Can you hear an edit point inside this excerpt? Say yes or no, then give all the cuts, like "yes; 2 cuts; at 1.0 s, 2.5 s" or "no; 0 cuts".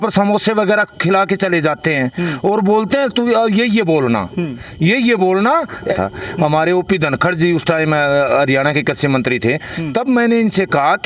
yes; 1 cut; at 6.0 s